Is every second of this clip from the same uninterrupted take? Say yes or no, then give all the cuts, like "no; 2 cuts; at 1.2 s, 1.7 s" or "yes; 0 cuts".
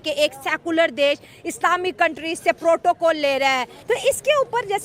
no; 1 cut; at 3.7 s